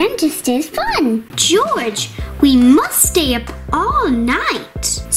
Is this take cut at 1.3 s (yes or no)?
yes